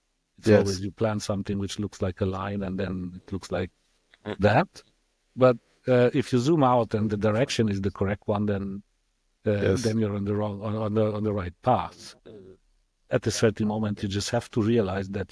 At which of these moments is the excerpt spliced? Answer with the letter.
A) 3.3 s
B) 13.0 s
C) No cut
B